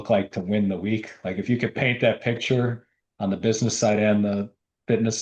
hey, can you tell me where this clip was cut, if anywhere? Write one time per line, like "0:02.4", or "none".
none